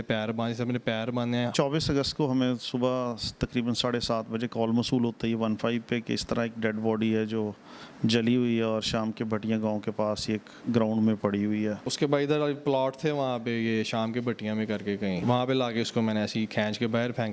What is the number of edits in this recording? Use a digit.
3